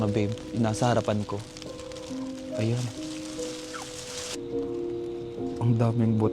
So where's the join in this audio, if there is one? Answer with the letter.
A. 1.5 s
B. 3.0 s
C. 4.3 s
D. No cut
C